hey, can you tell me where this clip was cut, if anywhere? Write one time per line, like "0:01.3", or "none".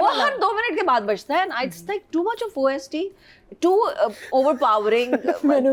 none